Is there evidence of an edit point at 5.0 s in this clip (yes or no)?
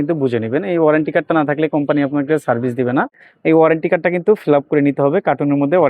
no